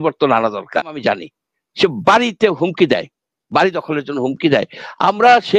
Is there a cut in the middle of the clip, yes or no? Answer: yes